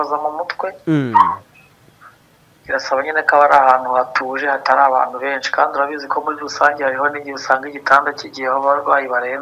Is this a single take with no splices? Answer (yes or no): yes